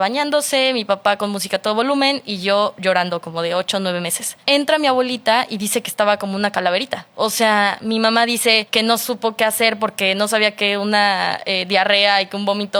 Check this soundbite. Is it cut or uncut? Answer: uncut